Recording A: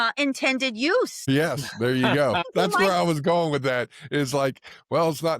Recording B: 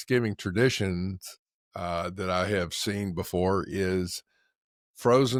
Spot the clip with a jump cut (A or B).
A